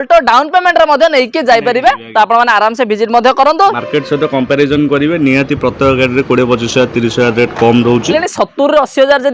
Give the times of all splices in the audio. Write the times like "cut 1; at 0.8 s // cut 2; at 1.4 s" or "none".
cut 1; at 3.8 s // cut 2; at 8.1 s